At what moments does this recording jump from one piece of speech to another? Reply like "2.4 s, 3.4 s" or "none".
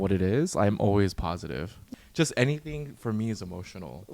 1.8 s